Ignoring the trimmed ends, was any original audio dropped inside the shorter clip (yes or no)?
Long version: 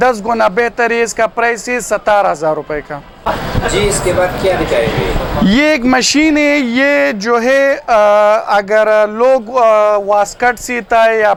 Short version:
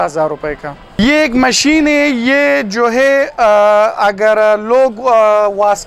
yes